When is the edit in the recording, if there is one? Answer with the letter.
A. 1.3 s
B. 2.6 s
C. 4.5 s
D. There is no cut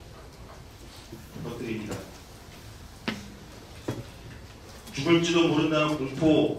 C